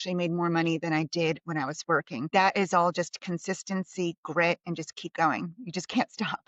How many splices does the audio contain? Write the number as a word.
one